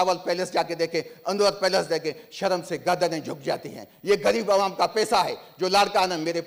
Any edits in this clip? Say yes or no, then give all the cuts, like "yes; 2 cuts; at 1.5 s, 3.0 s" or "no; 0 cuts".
no; 0 cuts